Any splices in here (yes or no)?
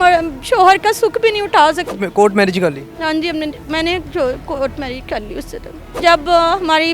yes